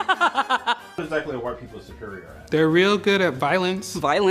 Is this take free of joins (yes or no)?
no